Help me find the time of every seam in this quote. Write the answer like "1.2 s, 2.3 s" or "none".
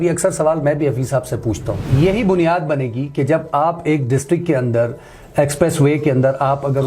1.8 s